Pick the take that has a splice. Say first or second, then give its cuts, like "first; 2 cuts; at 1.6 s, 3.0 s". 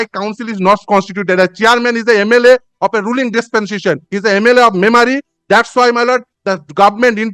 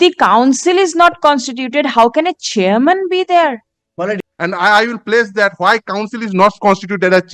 second; 1 cut; at 4.2 s